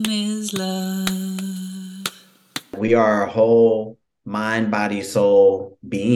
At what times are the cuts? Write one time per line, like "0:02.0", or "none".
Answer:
0:02.7